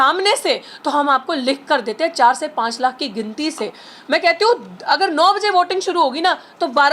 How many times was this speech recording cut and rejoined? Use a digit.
0